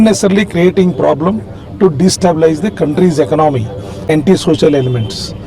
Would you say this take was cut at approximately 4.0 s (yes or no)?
yes